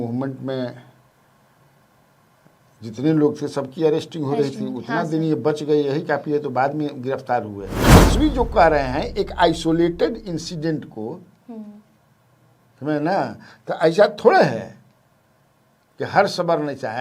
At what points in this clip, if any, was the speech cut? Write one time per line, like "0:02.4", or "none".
0:08.0

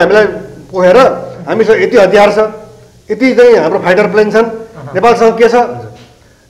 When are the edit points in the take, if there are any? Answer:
none

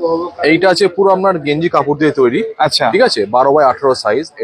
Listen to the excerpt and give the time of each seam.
none

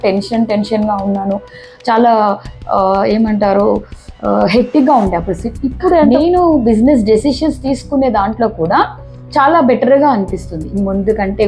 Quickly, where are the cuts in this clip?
0:06.1

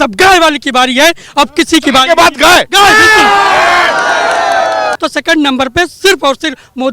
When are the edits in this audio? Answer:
0:04.9

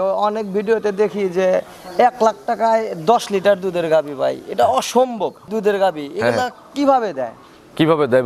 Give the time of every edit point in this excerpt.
0:05.4

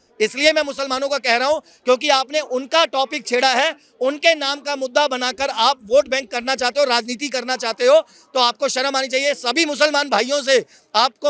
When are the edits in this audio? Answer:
none

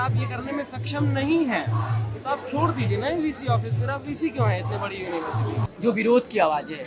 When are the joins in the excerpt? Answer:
0:05.7

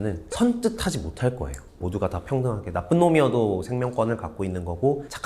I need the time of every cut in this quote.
0:01.8

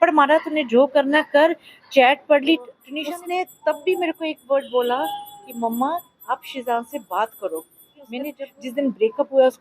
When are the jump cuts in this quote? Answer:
0:02.8
0:08.2

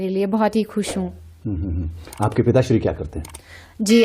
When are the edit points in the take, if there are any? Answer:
none

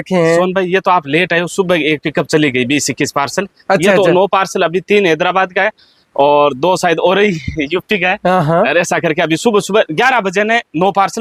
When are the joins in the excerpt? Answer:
none

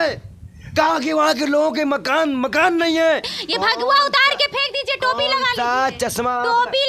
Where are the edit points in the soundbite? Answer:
0:03.3

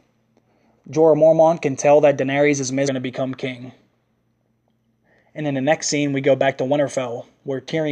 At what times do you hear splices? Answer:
none

